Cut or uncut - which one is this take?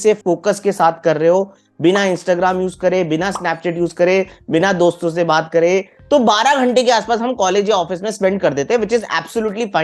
cut